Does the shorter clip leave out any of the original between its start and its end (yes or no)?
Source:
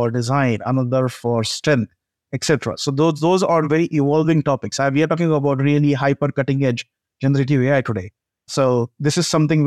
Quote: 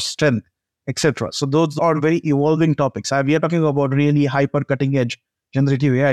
yes